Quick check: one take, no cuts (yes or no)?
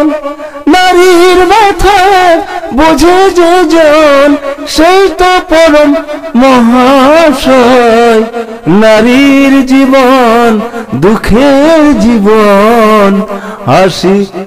yes